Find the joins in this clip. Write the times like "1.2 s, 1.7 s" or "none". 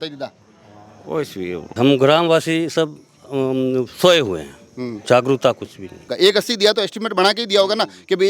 1.8 s, 6.1 s